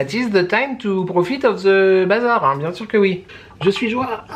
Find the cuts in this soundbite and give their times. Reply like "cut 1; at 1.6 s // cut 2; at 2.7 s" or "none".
cut 1; at 3.3 s